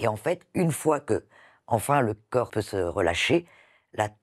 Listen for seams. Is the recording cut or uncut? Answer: cut